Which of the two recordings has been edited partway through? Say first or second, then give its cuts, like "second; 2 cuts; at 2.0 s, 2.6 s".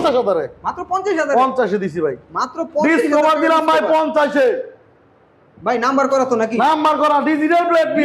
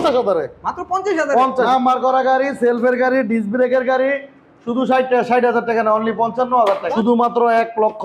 second; 2 cuts; at 1.7 s, 6.9 s